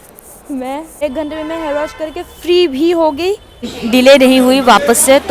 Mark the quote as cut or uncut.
cut